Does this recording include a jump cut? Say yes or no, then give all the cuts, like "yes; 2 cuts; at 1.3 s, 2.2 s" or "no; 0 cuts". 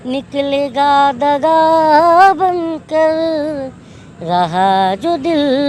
no; 0 cuts